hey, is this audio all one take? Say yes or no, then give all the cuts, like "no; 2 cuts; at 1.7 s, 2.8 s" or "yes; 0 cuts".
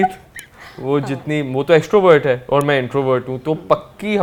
yes; 0 cuts